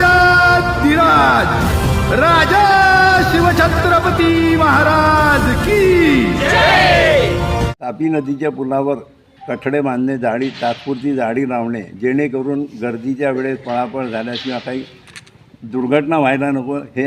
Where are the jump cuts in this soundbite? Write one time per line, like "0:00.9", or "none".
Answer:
0:07.8